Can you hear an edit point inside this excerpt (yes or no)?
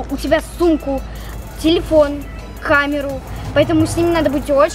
no